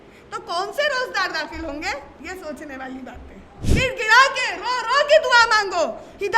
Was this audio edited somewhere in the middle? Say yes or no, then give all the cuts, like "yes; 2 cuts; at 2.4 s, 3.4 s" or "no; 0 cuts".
yes; 1 cut; at 3.5 s